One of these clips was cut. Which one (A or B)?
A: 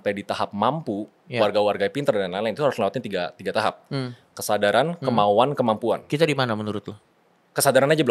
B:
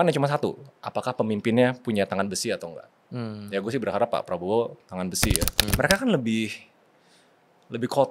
B